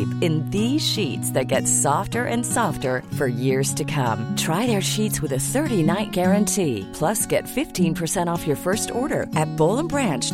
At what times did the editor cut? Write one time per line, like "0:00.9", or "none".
none